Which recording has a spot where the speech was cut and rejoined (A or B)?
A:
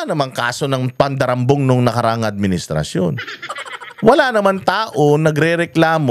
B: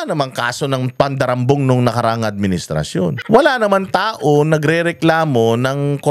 B